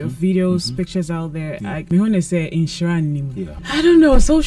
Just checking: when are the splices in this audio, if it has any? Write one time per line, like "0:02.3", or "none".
0:01.8
0:03.6